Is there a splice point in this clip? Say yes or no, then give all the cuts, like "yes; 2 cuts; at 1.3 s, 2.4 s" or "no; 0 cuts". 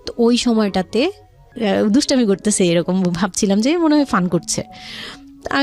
yes; 1 cut; at 1.4 s